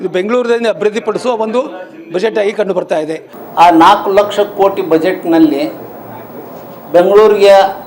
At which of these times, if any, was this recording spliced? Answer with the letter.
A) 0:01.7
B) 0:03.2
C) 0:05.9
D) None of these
B